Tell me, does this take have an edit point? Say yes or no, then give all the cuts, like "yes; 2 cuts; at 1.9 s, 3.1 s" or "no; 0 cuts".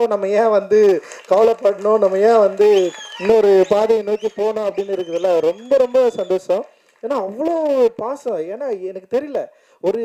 no; 0 cuts